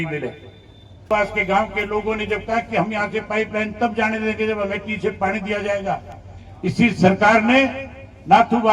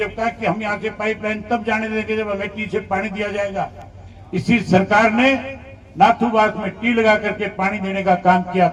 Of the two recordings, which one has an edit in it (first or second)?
first